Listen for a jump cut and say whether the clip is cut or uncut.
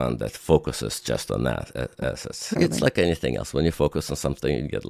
cut